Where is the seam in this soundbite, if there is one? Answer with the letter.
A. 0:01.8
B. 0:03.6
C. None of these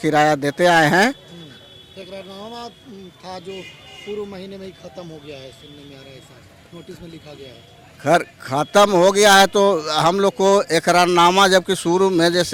C